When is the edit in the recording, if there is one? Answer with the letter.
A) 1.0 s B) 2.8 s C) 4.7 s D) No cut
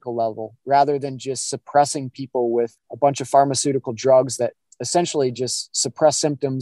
B